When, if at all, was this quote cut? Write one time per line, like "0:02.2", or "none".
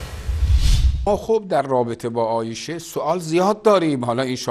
0:00.9